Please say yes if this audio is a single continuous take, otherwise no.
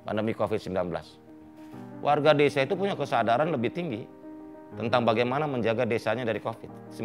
no